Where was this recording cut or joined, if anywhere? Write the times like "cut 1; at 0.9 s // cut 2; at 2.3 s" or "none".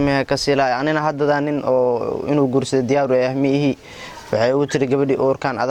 none